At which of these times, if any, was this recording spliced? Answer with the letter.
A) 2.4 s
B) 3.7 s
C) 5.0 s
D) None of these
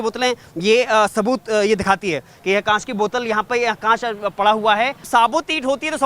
C